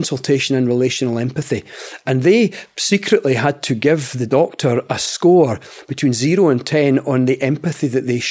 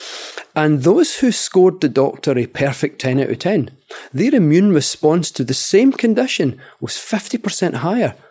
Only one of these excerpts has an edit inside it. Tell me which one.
first; 1 cut; at 4.1 s

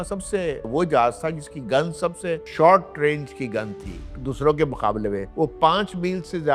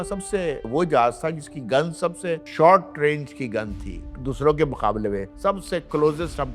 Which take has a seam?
second; 1 cut; at 5.3 s

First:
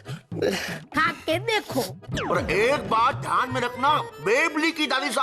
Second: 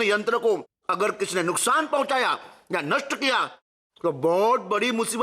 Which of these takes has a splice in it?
first; 1 cut; at 2.1 s

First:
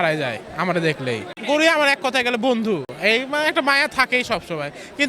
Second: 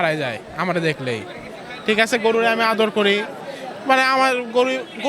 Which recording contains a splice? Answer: first; 2 cuts; at 1.3 s, 2.9 s

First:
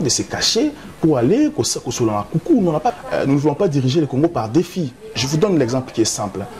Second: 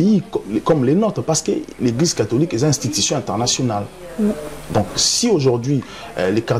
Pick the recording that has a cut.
first; 1 cut; at 2.9 s

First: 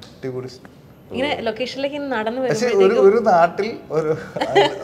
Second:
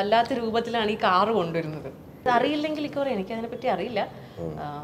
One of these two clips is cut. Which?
second; 1 cut; at 2.2 s

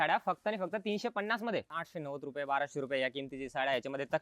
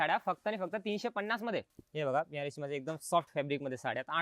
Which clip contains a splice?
first; 1 cut; at 1.8 s

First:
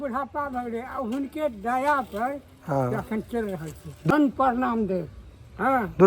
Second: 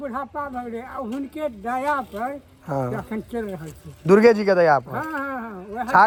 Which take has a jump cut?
first; 1 cut; at 4.1 s

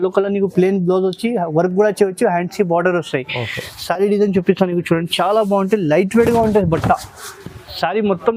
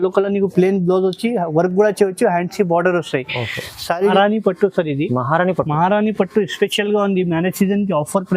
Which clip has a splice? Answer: second; 1 cut; at 4.1 s

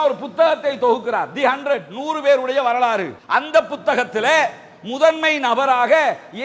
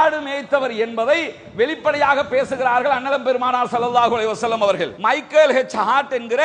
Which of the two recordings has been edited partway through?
second; 1 cut; at 4.9 s

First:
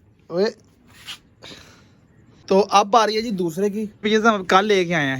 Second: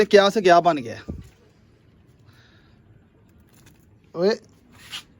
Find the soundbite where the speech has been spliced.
first; 2 cuts; at 2.4 s, 4.0 s

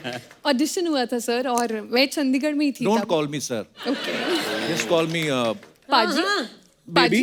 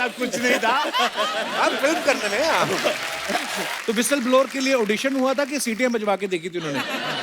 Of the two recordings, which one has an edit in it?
second; 1 cut; at 3.7 s

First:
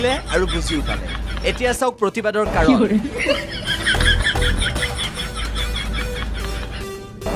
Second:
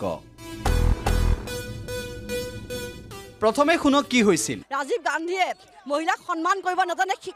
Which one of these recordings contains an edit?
second; 1 cut; at 4.6 s

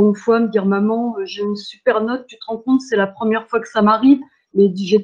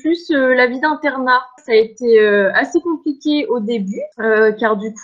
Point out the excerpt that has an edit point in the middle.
second; 2 cuts; at 1.5 s, 4.1 s

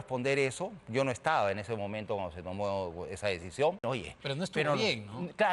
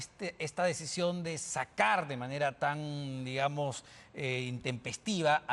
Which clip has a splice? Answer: first; 1 cut; at 3.8 s

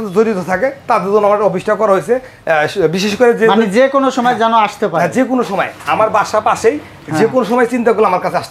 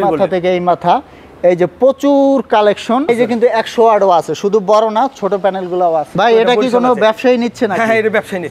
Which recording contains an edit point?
second; 2 cuts; at 3.1 s, 6.1 s

